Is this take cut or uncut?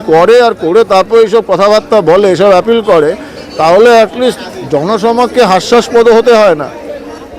uncut